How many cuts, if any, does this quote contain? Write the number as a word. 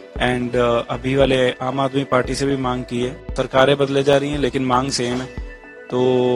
one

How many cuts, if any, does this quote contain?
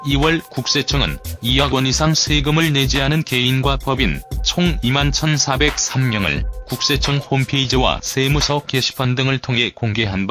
one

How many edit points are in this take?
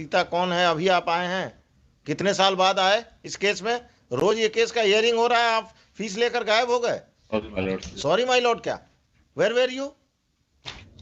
zero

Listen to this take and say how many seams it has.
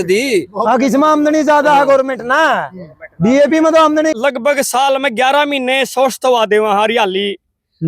one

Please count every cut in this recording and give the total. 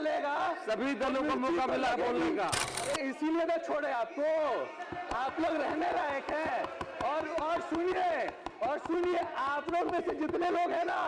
one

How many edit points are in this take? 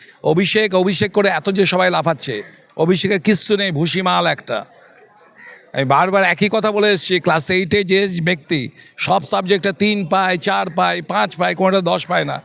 zero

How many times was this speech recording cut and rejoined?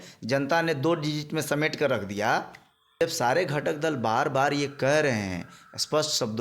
one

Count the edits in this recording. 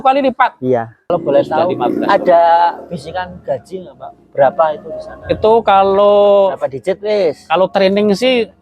one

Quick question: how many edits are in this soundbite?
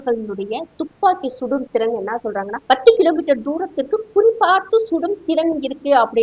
one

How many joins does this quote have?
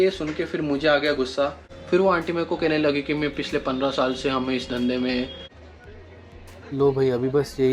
two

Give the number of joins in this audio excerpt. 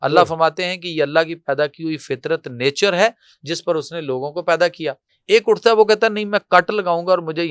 one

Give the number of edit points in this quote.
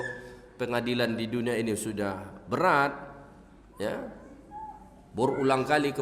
zero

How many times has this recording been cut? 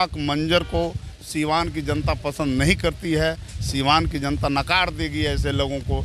zero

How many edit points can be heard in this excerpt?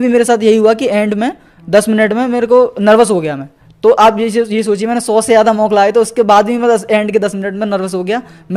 zero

